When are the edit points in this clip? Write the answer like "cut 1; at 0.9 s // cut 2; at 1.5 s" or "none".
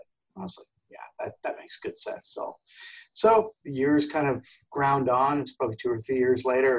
none